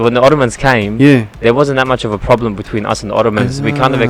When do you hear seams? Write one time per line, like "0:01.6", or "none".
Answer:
none